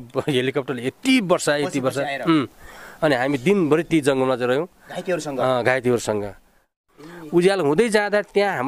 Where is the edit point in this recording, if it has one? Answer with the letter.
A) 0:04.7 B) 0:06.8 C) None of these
B